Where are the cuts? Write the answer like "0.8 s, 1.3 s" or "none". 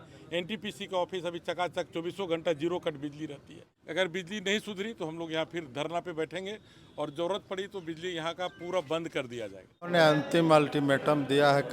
3.7 s, 9.8 s